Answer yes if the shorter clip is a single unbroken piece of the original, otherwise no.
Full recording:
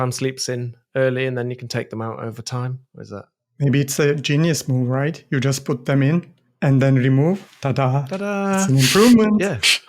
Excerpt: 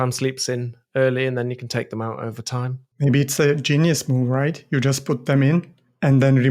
no